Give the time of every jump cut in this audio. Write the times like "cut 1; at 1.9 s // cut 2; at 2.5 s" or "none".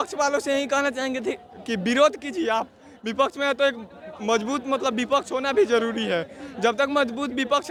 none